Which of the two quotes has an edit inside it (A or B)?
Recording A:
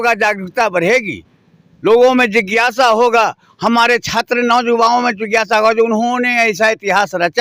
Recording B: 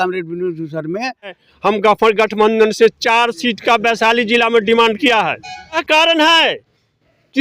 B